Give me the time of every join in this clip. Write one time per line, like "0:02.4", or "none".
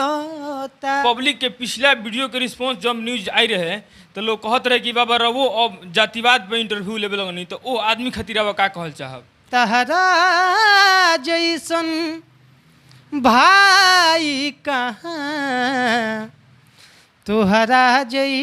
0:01.0
0:09.4